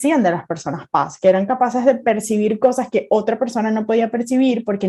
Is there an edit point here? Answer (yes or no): no